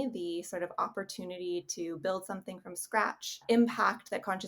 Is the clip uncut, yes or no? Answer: no